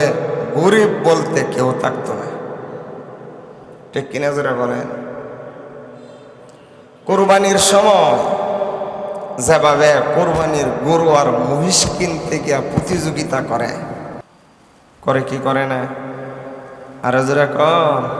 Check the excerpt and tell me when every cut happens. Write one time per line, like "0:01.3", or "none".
0:14.3